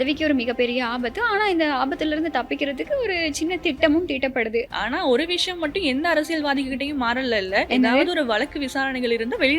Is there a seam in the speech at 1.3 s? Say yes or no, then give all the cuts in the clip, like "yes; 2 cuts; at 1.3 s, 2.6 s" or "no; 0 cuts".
no; 1 cut; at 4.7 s